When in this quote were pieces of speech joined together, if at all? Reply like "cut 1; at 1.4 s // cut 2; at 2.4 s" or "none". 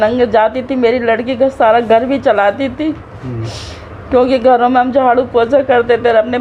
none